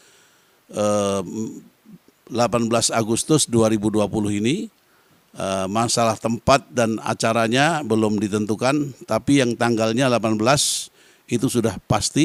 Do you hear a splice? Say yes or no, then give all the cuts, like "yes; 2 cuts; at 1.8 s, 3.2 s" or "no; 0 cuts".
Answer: no; 0 cuts